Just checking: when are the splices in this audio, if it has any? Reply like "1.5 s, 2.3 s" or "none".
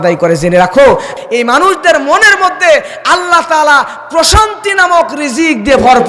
1.1 s